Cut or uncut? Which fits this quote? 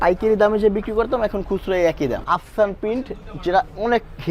cut